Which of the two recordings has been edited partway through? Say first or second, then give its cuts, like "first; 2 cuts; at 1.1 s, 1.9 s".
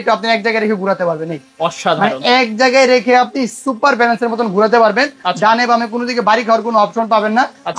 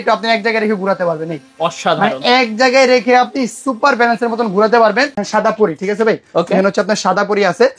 second; 1 cut; at 5.2 s